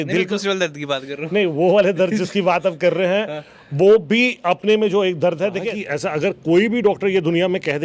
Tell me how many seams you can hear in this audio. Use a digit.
1